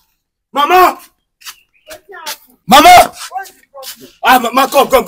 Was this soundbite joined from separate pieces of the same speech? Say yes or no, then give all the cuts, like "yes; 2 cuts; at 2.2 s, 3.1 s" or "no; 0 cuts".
yes; 1 cut; at 2.5 s